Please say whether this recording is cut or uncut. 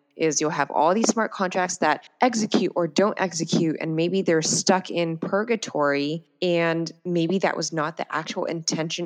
uncut